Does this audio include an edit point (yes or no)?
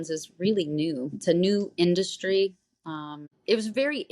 yes